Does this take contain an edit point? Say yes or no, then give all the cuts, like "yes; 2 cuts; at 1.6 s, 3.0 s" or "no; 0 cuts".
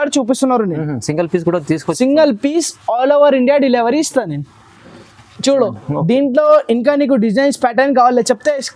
no; 0 cuts